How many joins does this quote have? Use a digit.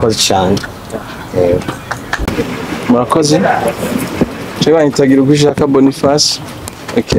1